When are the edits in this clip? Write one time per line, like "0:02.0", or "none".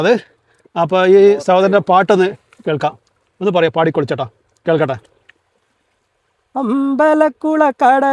none